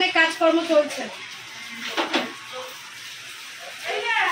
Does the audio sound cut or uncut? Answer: uncut